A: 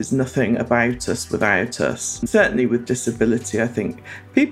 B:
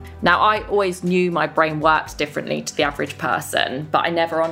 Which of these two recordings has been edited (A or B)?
A